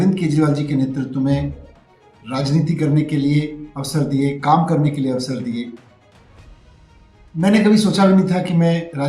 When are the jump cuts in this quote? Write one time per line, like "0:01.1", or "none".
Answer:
0:06.1
0:07.3